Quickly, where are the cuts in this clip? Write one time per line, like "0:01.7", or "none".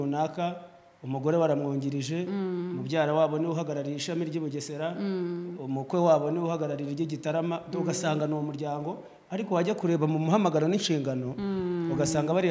none